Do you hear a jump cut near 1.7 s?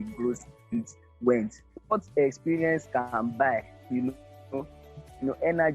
yes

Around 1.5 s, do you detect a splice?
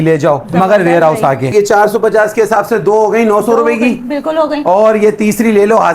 yes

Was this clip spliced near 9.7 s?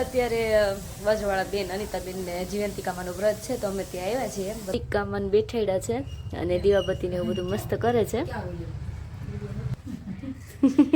yes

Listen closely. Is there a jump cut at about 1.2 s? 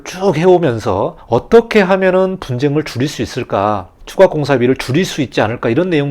yes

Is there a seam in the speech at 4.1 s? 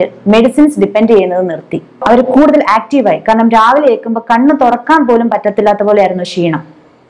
no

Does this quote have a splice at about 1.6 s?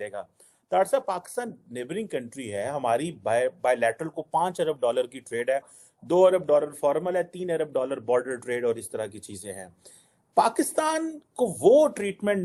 no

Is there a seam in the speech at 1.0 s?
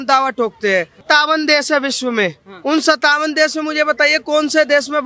yes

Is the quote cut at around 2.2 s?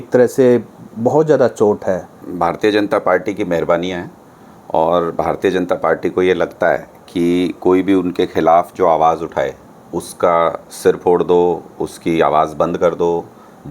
yes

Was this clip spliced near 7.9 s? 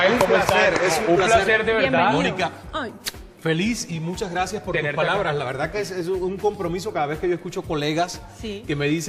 yes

